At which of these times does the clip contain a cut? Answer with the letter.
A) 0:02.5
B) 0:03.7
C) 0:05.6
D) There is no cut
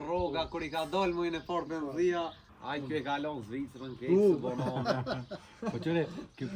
A